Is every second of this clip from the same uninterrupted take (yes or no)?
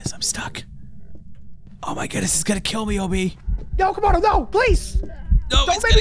yes